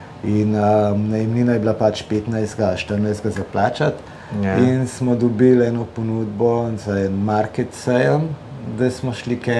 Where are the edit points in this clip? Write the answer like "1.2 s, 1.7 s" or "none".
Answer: none